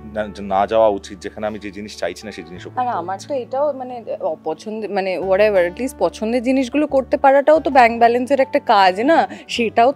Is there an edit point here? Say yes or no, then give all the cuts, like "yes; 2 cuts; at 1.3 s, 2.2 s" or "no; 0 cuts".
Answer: no; 0 cuts